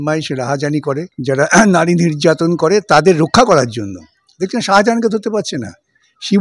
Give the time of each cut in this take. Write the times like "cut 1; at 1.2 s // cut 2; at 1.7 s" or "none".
cut 1; at 1.1 s